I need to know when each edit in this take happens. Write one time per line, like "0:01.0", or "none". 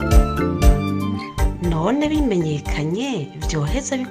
none